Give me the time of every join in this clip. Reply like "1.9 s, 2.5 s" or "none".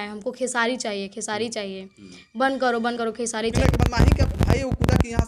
3.4 s

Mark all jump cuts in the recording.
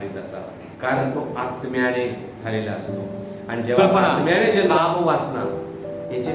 4.7 s

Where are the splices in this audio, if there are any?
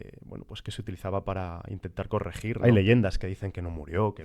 2.6 s

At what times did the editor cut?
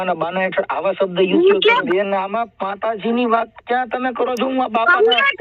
1.8 s

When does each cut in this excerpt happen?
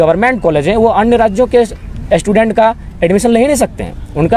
none

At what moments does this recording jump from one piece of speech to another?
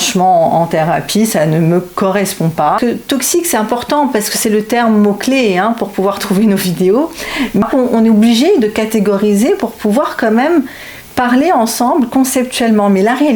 2.8 s, 7.6 s

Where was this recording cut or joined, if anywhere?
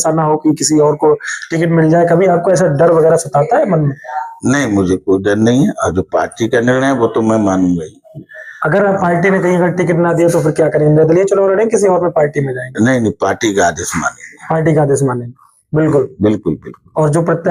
none

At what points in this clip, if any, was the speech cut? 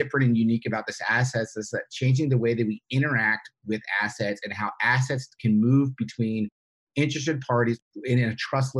none

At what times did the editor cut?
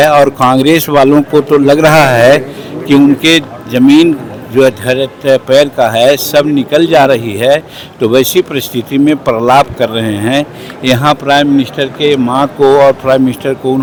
none

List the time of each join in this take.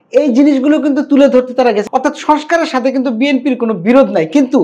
1.8 s

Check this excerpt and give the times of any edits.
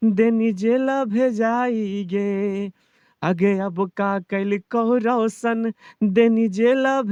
none

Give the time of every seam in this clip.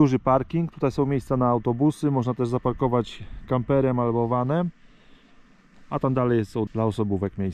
none

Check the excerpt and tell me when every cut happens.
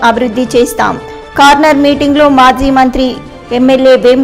none

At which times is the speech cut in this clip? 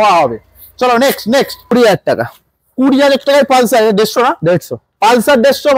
1.7 s

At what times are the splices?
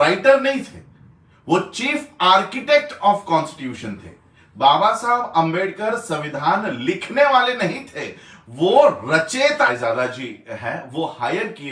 9.7 s

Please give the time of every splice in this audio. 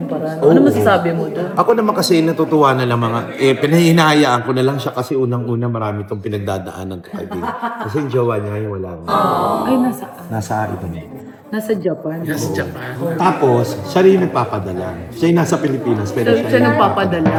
none

